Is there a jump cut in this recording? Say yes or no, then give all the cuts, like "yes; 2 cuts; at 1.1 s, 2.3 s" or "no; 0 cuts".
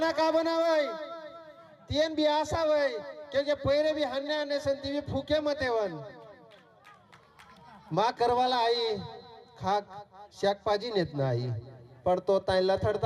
no; 0 cuts